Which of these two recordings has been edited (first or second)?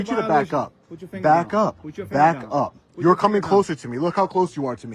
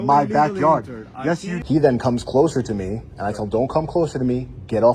second